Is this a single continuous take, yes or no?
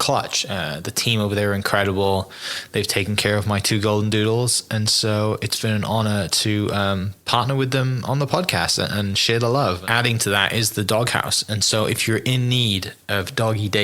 no